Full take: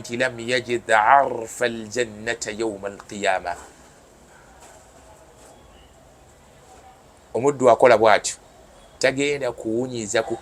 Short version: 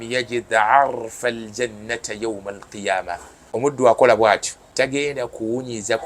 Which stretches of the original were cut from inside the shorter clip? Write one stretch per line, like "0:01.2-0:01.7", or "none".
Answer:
0:04.0-0:07.4
0:08.4-0:08.8